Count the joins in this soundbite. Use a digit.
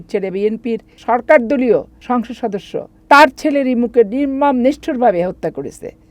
2